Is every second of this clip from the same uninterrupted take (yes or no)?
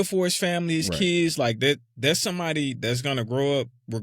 yes